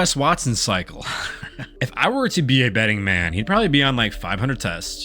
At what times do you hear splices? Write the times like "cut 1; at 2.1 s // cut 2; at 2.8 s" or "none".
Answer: cut 1; at 1.7 s